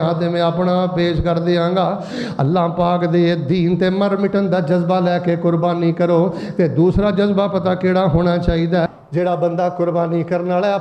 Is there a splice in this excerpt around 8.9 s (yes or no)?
yes